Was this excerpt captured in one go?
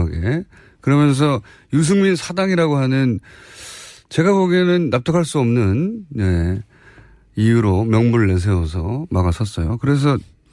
yes; 0 cuts

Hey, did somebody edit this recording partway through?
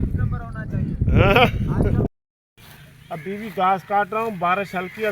yes; 1 cut; at 2.1 s

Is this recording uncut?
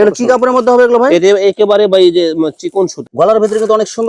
no; 1 cut; at 3.0 s

